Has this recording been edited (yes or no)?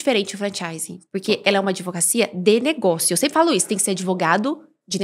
no